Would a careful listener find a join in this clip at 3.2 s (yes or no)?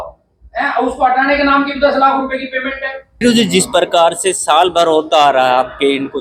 yes